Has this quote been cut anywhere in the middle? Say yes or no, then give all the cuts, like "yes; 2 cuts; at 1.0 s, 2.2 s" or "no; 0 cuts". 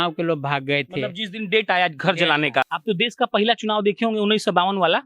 yes; 1 cut; at 2.7 s